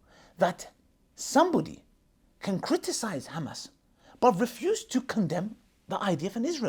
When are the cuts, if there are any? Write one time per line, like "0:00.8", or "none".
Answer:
none